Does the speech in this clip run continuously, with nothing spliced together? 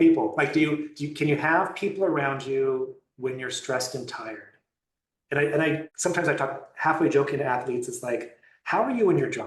no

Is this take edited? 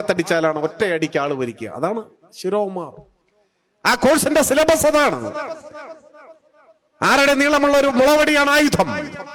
no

